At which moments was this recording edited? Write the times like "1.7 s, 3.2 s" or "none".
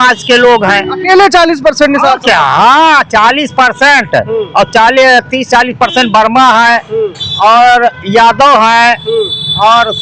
none